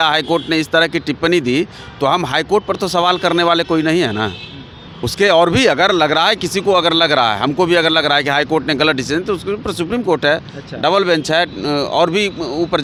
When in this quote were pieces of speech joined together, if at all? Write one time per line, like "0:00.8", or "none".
none